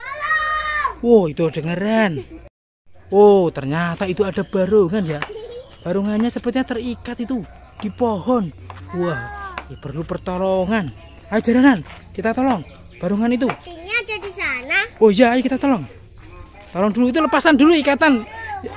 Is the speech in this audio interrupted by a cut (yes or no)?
no